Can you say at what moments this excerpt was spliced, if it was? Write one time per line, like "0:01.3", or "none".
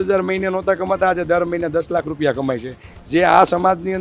none